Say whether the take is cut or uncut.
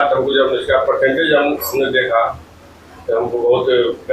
uncut